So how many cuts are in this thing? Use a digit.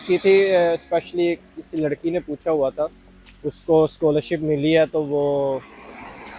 0